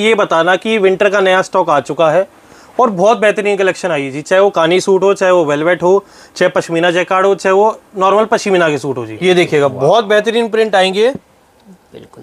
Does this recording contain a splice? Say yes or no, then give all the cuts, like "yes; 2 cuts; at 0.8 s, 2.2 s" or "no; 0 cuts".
yes; 1 cut; at 9.2 s